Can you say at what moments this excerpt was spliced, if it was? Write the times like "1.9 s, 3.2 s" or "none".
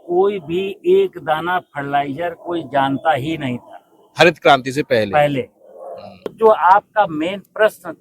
6.3 s